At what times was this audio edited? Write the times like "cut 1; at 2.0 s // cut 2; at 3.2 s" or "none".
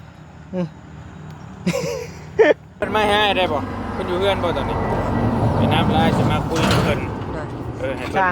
cut 1; at 2.8 s

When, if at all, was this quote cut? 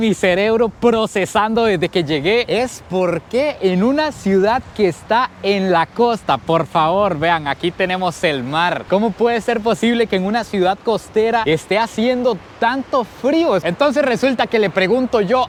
none

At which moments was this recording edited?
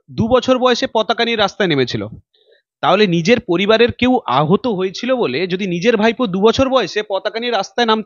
none

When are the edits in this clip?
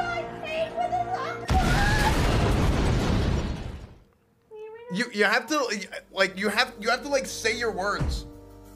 none

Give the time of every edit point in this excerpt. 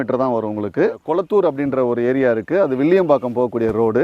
cut 1; at 1.0 s

